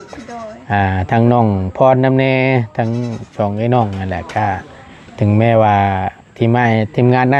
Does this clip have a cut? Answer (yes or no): no